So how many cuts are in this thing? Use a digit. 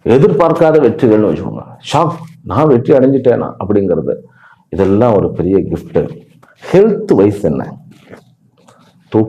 0